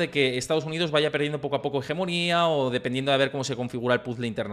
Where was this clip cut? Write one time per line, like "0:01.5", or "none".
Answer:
none